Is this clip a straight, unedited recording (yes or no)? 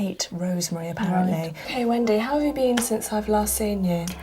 no